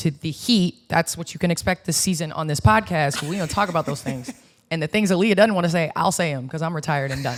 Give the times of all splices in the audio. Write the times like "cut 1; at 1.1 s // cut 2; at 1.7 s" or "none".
none